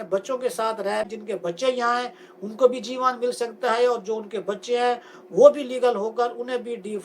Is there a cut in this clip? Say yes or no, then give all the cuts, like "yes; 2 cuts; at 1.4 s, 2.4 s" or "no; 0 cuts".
yes; 1 cut; at 1.1 s